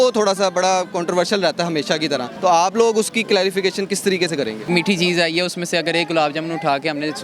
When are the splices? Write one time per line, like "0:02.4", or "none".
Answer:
0:02.3
0:04.6